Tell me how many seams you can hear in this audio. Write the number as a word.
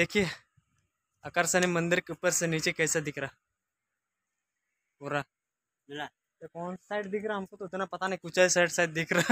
zero